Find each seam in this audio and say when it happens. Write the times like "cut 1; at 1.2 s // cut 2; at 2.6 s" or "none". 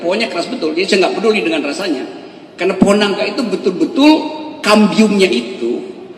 none